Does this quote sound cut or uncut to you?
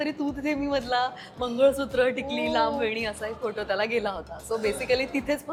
uncut